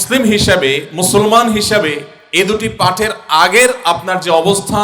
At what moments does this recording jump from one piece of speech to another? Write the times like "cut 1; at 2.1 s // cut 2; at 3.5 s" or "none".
cut 1; at 2.1 s